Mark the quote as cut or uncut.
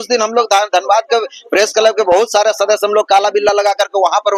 uncut